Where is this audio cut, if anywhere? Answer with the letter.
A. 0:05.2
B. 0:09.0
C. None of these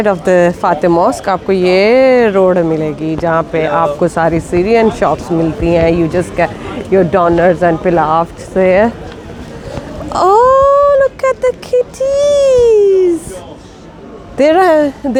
C